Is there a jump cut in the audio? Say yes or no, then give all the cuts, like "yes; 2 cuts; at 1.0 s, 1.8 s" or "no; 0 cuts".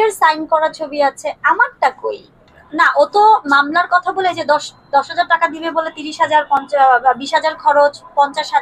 yes; 1 cut; at 2.6 s